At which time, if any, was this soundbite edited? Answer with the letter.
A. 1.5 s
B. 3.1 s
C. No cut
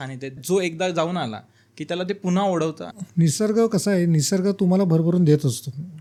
C